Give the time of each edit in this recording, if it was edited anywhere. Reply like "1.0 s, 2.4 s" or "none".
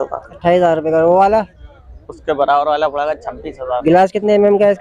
3.8 s